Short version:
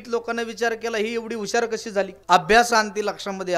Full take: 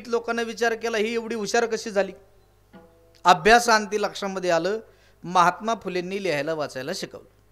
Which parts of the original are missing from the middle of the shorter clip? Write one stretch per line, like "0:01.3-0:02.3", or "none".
0:02.2-0:03.1